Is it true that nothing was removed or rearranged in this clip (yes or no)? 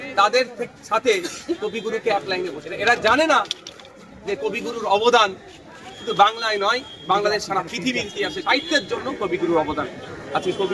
no